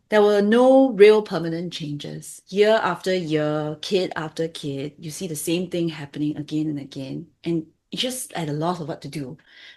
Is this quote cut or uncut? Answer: cut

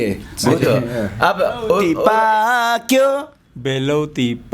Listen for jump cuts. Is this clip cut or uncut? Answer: cut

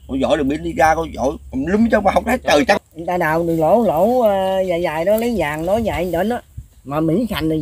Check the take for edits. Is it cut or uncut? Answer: cut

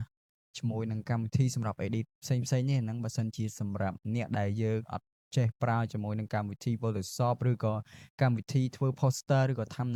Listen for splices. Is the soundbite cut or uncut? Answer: uncut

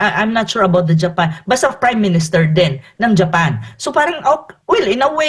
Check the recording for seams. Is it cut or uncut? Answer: uncut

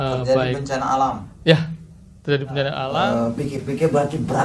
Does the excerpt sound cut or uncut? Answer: cut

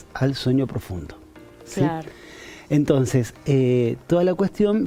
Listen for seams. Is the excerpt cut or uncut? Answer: uncut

